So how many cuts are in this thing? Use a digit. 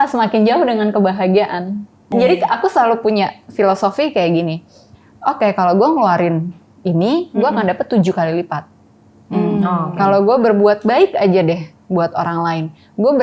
1